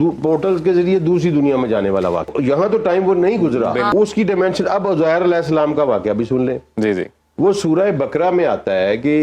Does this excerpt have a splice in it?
no; 0 cuts

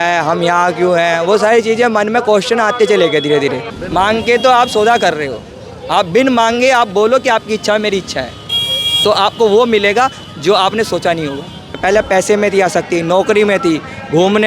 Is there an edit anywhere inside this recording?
yes; 2 cuts; at 3.7 s, 11.8 s

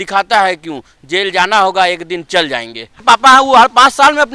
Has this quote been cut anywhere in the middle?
yes; 1 cut; at 3.0 s

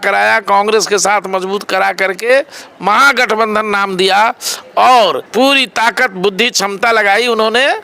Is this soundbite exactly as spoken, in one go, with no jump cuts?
no; 1 cut; at 5.2 s

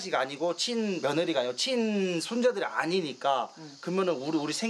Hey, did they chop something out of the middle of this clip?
yes; 1 cut; at 1.0 s

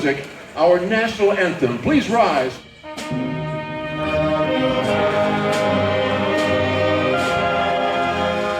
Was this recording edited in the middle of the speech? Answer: yes; 1 cut; at 2.5 s

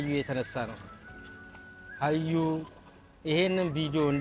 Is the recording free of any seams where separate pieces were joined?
yes; 0 cuts

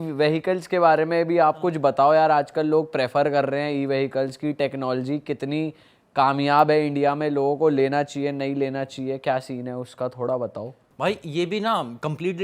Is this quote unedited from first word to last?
yes; 0 cuts

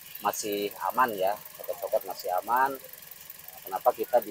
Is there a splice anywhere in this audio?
no; 0 cuts

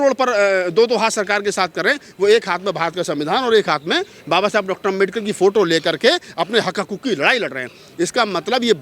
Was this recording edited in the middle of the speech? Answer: no; 0 cuts

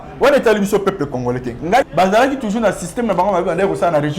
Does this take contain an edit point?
yes; 1 cut; at 1.8 s

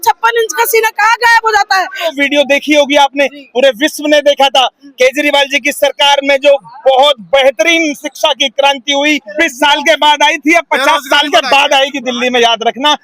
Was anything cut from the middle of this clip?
yes; 2 cuts; at 2.1 s, 9.3 s

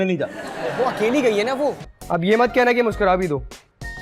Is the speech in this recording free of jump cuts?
no; 1 cut; at 1.9 s

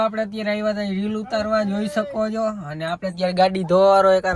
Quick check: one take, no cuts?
yes; 0 cuts

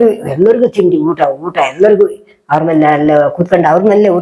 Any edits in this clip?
no; 0 cuts

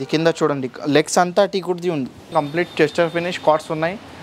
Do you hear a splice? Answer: yes; 1 cut; at 2.3 s

